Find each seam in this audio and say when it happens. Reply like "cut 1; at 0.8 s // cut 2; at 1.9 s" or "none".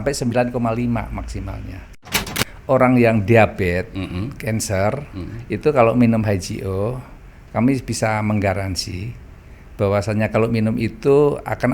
cut 1; at 2.2 s